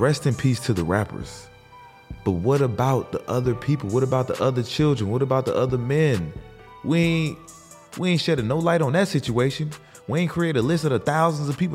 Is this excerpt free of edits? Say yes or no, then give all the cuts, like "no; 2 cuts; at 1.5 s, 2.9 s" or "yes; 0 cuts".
yes; 0 cuts